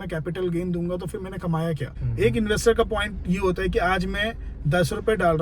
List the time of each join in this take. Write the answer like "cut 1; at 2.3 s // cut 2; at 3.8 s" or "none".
cut 1; at 1.9 s